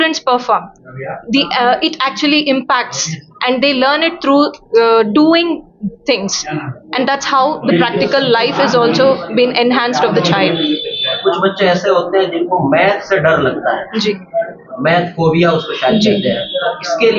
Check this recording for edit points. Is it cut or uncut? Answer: uncut